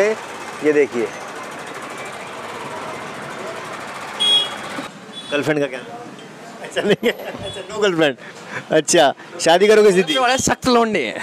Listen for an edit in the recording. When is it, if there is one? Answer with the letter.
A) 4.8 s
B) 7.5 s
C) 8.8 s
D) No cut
A